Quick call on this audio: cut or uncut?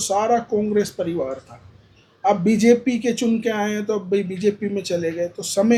uncut